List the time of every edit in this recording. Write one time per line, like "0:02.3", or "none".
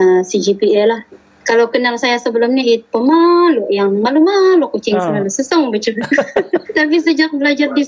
0:01.3
0:06.6